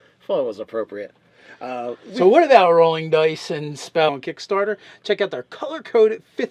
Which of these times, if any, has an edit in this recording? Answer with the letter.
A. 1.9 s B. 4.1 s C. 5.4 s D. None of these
D